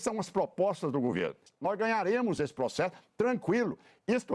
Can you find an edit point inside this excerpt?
yes; 1 cut; at 1.5 s

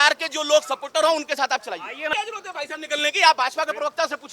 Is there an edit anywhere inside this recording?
yes; 1 cut; at 2.0 s

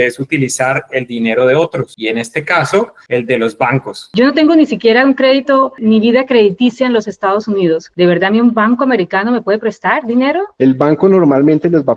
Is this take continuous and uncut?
no; 4 cuts; at 1.9 s, 3.0 s, 4.1 s, 10.5 s

